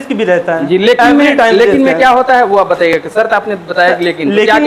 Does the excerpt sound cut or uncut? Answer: uncut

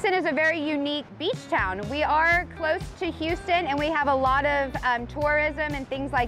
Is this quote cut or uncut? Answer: cut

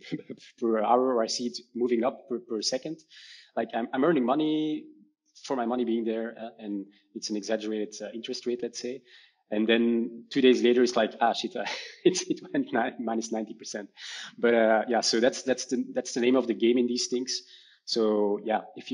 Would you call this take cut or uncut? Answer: uncut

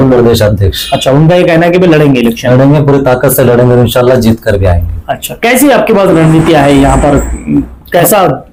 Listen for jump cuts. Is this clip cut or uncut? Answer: uncut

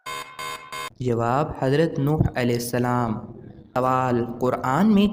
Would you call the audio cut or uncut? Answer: uncut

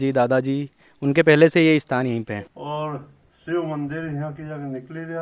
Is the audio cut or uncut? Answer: cut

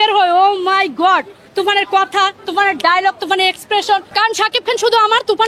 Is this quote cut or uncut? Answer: cut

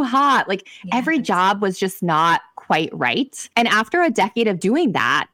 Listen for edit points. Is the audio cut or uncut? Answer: cut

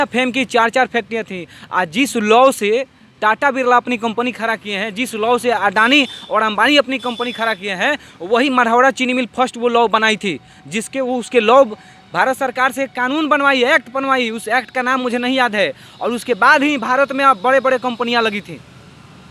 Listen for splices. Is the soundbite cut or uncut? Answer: uncut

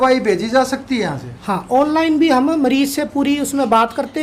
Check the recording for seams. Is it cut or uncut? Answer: uncut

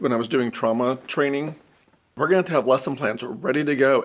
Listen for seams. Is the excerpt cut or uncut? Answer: cut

